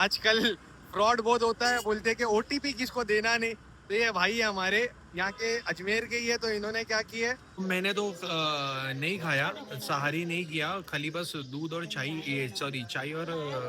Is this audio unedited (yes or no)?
no